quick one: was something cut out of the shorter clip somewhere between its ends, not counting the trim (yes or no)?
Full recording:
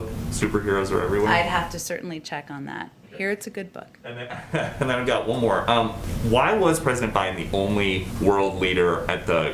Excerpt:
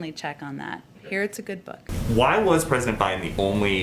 yes